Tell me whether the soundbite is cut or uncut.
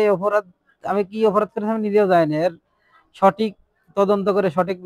uncut